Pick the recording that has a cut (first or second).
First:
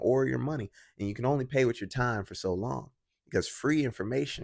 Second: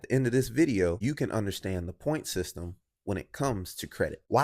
second